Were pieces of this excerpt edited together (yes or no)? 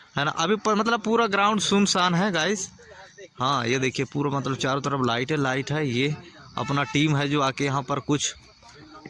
no